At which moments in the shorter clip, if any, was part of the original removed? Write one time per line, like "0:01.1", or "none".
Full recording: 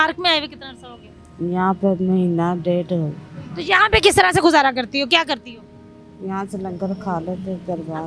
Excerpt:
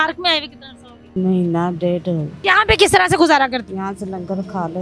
0:01.1
0:02.3
0:03.6